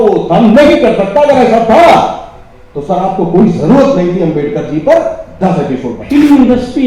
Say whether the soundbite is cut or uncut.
cut